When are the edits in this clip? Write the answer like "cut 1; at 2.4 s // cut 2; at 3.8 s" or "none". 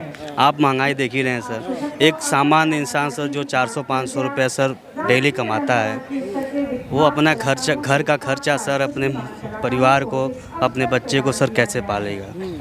none